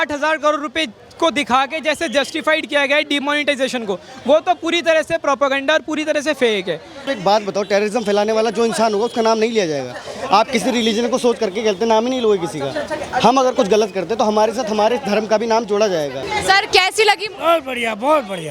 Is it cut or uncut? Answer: cut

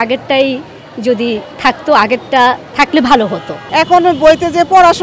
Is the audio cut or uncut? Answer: uncut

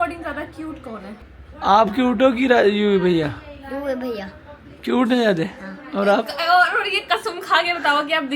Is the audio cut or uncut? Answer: uncut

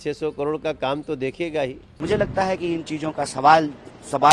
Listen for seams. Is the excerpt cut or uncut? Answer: cut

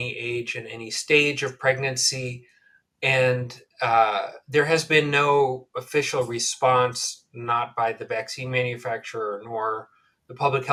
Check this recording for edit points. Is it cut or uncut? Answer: uncut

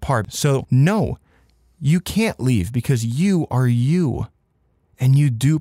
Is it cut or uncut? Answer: uncut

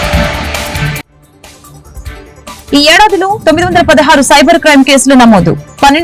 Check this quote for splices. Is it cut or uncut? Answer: cut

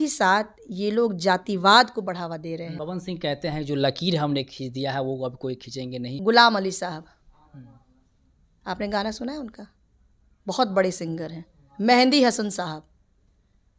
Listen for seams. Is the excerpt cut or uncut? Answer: cut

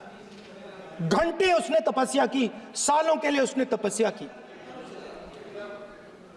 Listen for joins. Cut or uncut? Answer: uncut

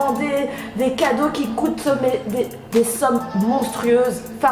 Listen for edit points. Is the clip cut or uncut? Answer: uncut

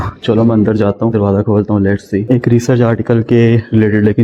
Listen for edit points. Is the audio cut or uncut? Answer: cut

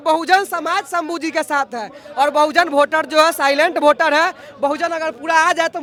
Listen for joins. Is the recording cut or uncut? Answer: uncut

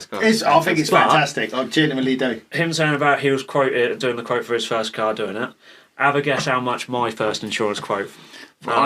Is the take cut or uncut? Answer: uncut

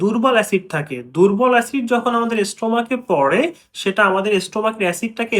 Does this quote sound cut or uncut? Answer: uncut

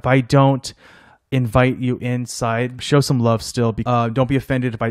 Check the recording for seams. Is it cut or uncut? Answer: cut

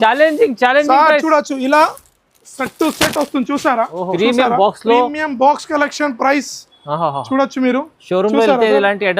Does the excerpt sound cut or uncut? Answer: cut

